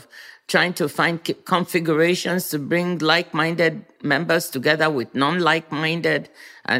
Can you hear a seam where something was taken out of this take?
no; 0 cuts

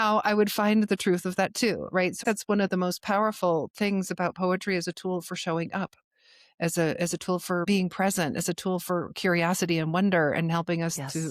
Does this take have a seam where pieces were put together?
yes; 2 cuts; at 2.2 s, 7.7 s

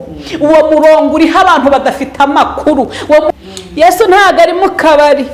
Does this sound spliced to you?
yes; 1 cut; at 3.3 s

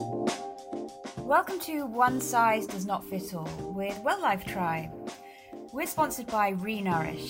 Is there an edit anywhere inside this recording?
yes; 1 cut; at 1.2 s

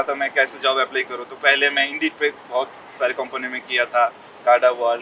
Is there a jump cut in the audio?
no; 0 cuts

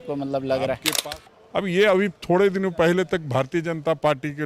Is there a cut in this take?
yes; 1 cut; at 0.9 s

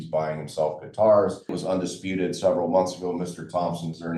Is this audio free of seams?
no; 1 cut; at 1.6 s

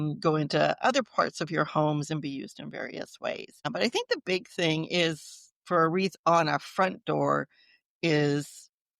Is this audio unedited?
no; 1 cut; at 3.6 s

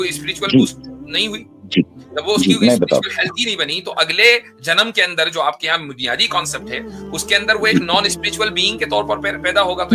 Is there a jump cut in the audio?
no; 0 cuts

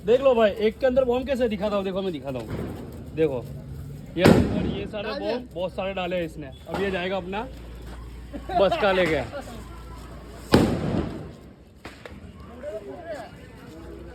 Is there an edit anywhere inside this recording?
no; 0 cuts

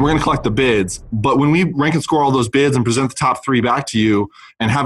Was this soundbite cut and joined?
yes; 2 cuts; at 1.0 s, 1.7 s

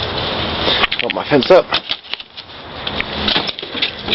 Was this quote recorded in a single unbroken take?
yes; 0 cuts

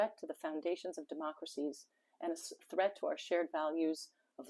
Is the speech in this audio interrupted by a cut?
no; 0 cuts

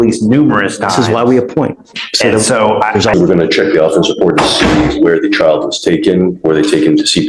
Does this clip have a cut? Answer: yes; 1 cut; at 3.1 s

